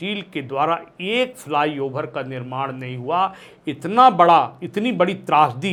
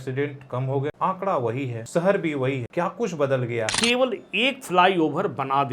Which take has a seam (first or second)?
second